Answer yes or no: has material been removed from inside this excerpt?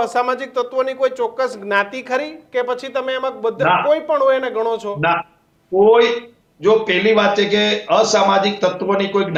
no